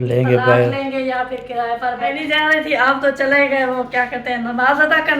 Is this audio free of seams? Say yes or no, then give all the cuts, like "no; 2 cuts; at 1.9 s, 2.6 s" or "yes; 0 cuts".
no; 1 cut; at 2.2 s